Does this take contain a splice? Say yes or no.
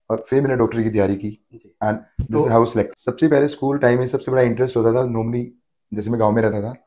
yes